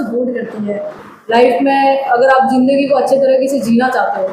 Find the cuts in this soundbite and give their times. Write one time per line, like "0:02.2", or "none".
0:01.0

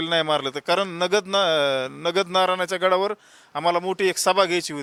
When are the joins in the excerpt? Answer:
none

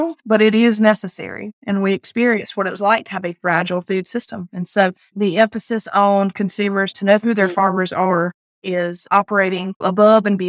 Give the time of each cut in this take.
none

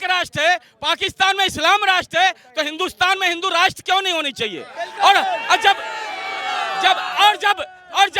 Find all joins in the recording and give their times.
none

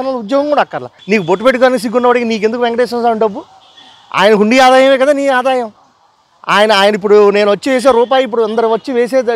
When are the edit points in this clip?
0:00.9

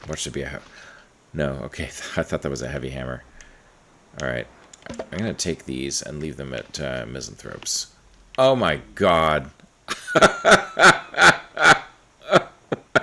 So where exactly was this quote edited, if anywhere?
none

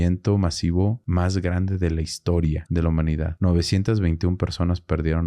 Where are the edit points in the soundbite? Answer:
0:01.0
0:03.0

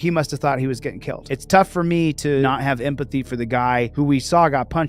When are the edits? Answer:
0:01.2
0:02.4

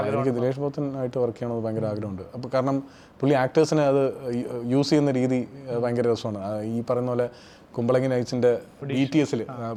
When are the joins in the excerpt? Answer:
none

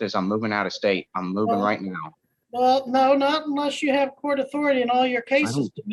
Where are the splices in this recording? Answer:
none

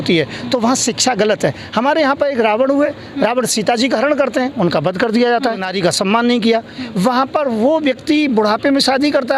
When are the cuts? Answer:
0:05.7

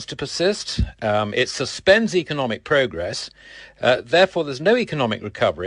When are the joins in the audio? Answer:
0:03.9

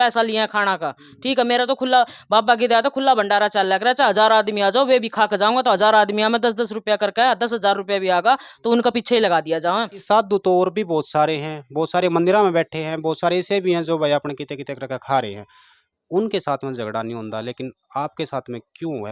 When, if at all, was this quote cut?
0:10.0

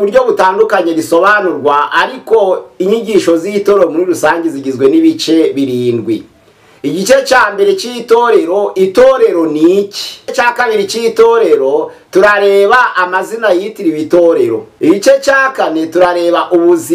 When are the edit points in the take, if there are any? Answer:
0:10.3
0:14.7

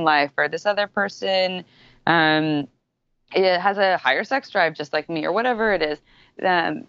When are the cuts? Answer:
none

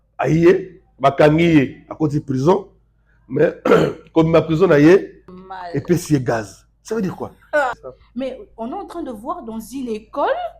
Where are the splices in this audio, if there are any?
0:05.1
0:07.8

